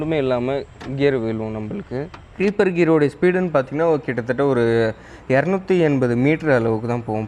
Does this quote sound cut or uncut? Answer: cut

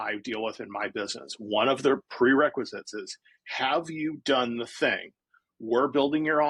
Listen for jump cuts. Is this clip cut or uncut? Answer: uncut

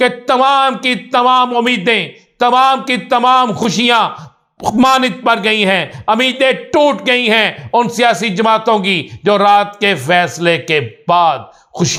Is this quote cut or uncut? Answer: uncut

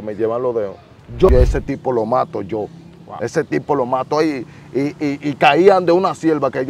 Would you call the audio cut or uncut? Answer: cut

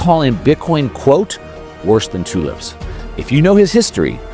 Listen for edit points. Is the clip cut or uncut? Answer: uncut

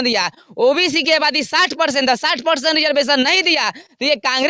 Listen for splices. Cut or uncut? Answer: uncut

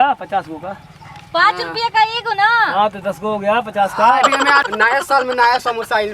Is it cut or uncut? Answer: cut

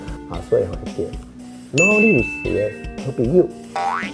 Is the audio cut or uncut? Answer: uncut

